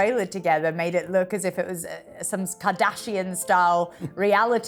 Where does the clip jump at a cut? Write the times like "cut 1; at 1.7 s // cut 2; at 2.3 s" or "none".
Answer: none